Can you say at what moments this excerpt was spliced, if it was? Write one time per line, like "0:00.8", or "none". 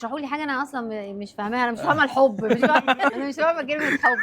0:03.1